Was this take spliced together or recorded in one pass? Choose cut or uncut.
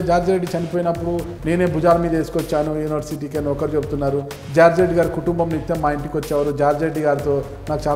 uncut